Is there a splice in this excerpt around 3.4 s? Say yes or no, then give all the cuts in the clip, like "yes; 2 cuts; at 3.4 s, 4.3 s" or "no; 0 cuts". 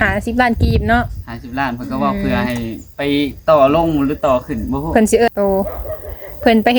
no; 1 cut; at 5.3 s